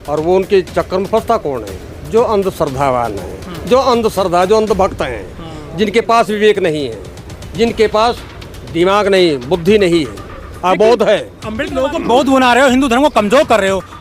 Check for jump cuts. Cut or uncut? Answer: cut